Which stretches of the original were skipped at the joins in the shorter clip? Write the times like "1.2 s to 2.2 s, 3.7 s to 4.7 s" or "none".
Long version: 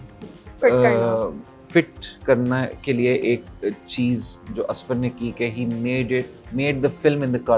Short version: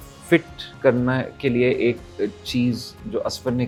none